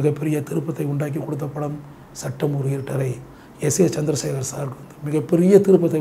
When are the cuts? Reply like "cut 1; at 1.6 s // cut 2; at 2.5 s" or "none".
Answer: none